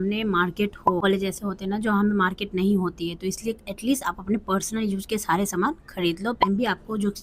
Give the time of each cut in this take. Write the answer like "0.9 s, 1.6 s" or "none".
1.0 s, 6.4 s